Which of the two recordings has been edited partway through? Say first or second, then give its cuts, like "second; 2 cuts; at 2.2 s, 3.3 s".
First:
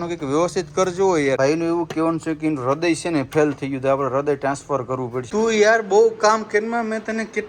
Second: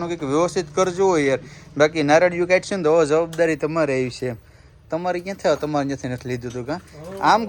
first; 2 cuts; at 1.4 s, 5.3 s